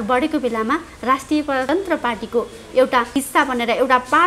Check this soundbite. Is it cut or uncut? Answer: cut